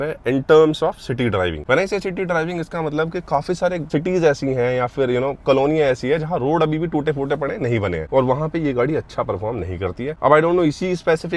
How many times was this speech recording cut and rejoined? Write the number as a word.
zero